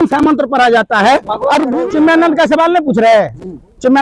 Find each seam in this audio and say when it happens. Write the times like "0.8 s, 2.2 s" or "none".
1.7 s